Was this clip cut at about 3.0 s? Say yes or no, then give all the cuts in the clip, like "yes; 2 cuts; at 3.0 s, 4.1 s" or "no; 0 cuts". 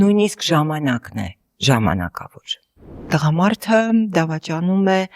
yes; 1 cut; at 3.0 s